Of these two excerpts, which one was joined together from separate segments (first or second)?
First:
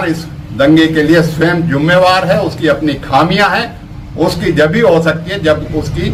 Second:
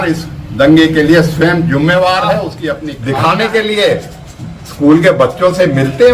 second